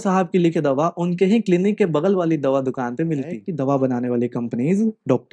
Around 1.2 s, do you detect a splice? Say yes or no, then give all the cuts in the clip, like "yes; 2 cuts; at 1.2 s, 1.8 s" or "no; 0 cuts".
no; 1 cut; at 3.4 s